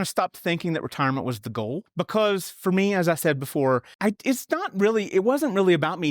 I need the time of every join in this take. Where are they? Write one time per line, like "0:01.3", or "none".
0:01.9
0:03.9